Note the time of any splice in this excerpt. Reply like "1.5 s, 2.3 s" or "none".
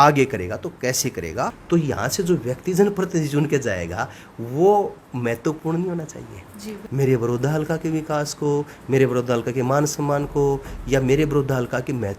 1.6 s, 6.8 s